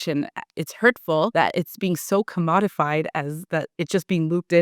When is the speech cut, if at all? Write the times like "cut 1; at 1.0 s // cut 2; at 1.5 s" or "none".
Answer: cut 1; at 1.3 s